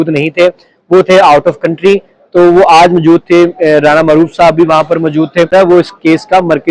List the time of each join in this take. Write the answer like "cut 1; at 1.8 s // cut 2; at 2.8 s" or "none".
cut 1; at 5.5 s